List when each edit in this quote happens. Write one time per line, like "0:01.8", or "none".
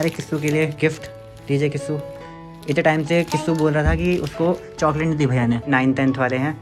0:05.7